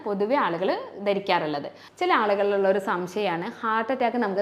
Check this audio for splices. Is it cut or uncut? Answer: cut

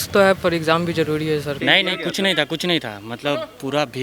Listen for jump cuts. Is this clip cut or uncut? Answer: cut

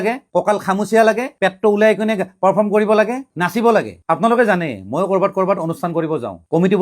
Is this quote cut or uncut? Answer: uncut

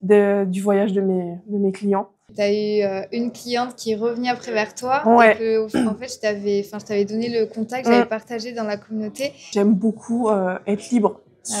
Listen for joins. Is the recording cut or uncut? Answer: cut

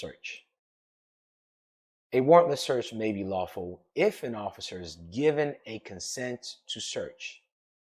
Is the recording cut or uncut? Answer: uncut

